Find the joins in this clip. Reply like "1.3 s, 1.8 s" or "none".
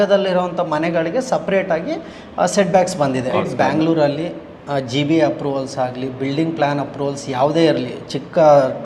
3.3 s